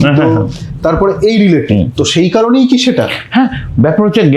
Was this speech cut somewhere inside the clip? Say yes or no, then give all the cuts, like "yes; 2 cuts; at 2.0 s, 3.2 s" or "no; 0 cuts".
no; 0 cuts